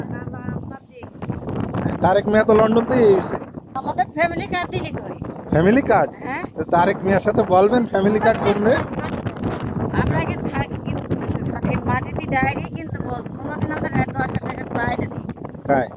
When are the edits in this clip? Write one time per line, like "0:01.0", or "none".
0:01.2
0:03.7
0:09.6